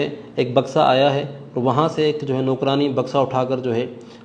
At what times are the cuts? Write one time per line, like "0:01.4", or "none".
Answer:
none

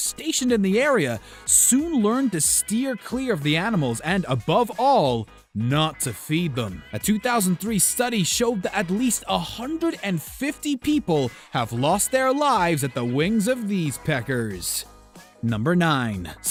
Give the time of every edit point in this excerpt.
none

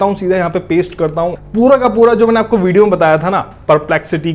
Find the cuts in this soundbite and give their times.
0:01.4

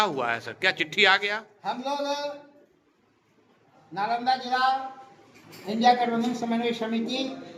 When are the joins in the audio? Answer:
none

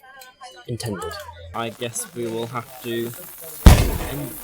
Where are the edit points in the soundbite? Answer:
0:01.5

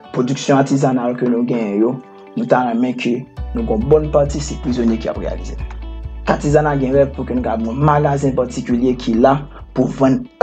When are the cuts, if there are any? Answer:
0:05.7

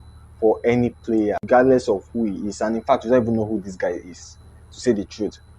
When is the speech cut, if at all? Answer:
0:01.4

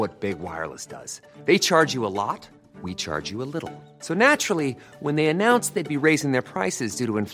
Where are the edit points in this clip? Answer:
none

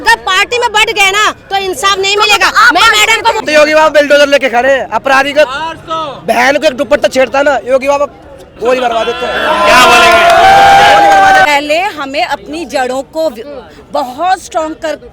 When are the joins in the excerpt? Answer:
0:03.4
0:11.5

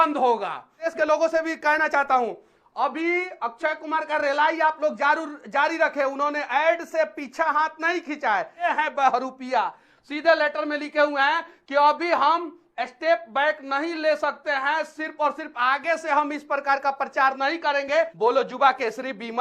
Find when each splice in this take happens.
0:00.9
0:08.7
0:18.1

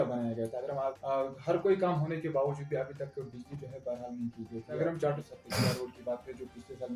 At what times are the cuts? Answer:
0:01.0
0:04.8

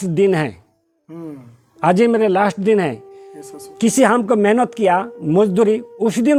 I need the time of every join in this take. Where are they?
none

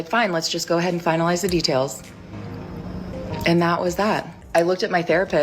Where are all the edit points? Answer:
0:01.2

